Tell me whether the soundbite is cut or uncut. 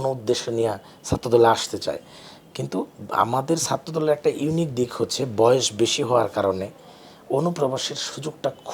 uncut